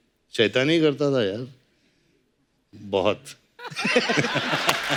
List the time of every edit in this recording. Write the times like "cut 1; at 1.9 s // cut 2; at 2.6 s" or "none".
none